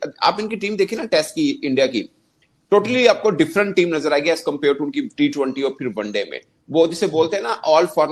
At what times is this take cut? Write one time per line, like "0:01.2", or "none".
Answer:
none